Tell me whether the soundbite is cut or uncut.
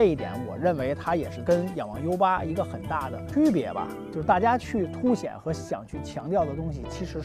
uncut